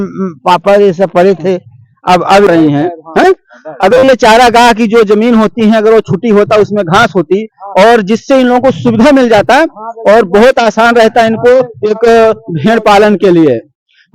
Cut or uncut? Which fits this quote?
cut